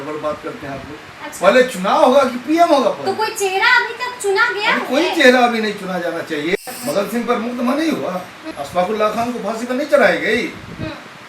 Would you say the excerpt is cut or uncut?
cut